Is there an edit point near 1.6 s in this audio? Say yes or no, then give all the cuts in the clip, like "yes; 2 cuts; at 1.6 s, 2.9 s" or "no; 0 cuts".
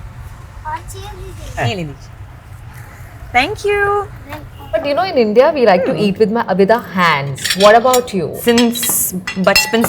yes; 3 cuts; at 1.6 s, 4.8 s, 8.3 s